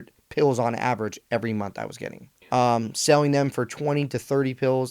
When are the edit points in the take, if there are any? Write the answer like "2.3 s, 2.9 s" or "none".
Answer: 2.4 s

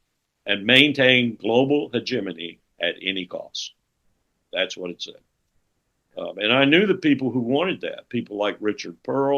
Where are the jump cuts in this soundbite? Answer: none

